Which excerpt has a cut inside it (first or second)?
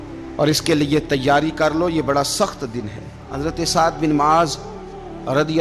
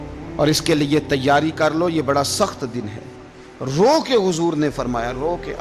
first